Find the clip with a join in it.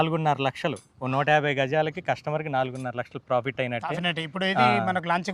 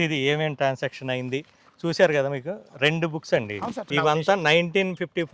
second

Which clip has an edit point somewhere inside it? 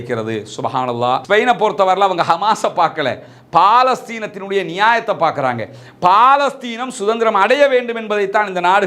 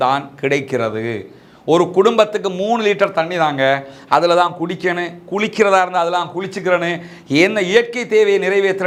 first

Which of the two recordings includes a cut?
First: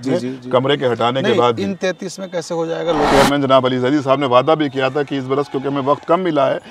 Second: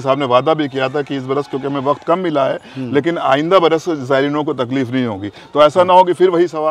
first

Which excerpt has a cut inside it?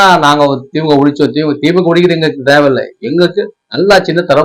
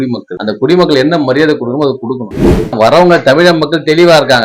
second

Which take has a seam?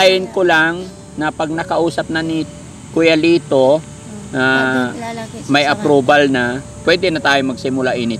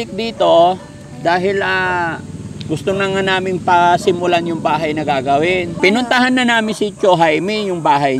second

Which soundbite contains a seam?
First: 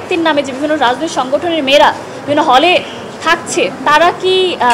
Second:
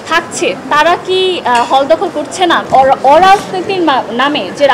second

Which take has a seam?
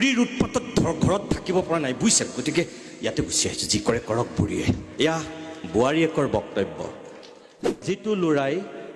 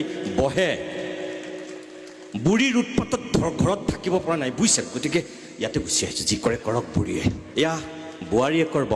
first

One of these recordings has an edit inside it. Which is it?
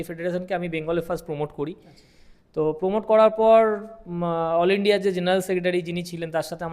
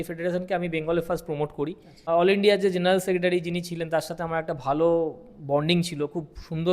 second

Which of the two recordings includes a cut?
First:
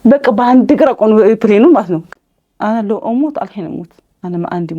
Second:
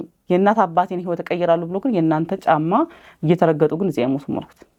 first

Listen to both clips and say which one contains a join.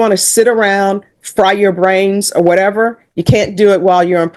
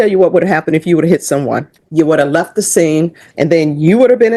second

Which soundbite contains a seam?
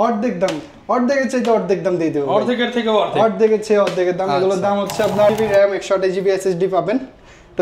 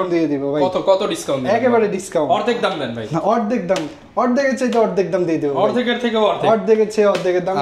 first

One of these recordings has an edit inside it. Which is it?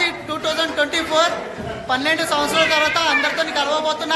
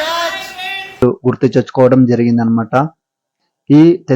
second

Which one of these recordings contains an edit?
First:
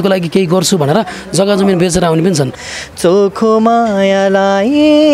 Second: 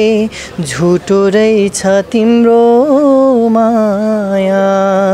first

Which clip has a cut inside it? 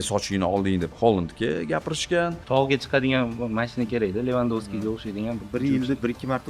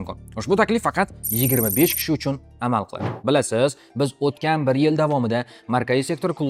first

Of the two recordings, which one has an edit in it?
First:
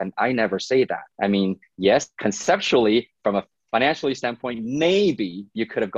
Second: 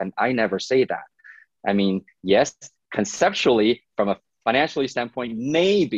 first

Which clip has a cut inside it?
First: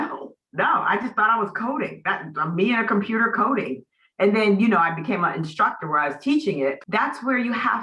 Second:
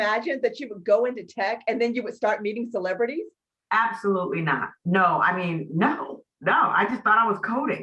first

